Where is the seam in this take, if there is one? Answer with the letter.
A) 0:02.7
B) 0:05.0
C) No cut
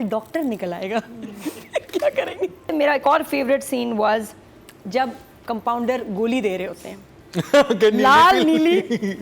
A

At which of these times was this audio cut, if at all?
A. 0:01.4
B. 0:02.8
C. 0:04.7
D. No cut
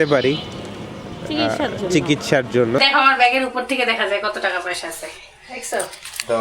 B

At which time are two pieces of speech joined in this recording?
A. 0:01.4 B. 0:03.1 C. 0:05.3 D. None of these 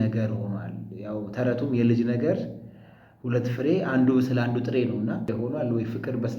C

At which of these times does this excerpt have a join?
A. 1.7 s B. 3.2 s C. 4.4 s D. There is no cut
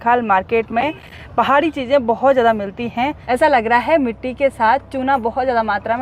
B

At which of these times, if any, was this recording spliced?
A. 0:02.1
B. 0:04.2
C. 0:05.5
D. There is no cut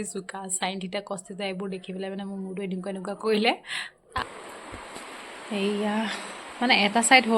B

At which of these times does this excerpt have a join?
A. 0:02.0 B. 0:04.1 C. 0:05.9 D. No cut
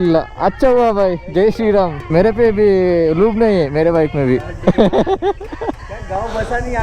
A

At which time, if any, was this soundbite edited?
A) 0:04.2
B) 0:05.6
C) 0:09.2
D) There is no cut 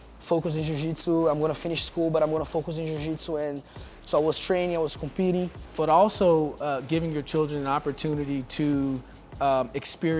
B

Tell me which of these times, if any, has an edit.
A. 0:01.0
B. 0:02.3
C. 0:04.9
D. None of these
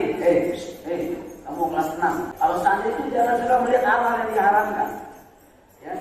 B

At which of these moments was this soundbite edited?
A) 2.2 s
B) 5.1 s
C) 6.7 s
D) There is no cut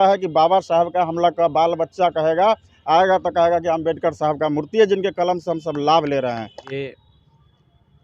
C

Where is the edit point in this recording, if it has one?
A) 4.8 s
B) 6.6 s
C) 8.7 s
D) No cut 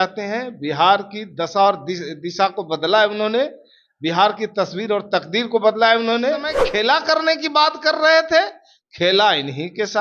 B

